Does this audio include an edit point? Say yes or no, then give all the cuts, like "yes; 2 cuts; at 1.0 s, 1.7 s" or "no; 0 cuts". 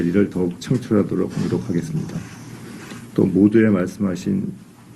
yes; 1 cut; at 2.4 s